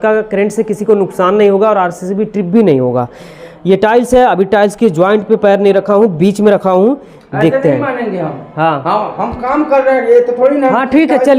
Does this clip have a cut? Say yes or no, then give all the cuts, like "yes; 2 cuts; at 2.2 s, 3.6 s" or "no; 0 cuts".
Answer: no; 0 cuts